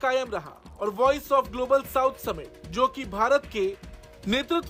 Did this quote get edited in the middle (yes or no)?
no